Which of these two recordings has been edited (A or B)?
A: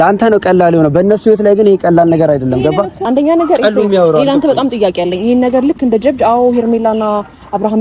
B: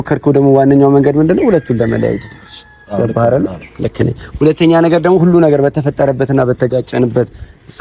A